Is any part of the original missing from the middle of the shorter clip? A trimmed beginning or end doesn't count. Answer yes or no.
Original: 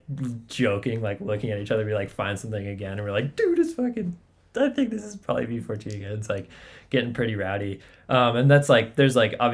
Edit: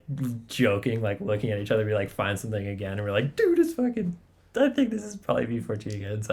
no